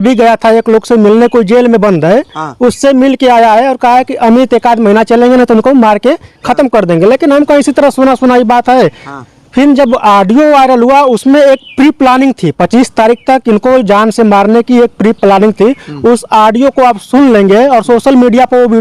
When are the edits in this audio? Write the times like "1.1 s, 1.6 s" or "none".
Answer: none